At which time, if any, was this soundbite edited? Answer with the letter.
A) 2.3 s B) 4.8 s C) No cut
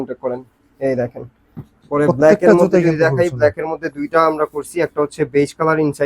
C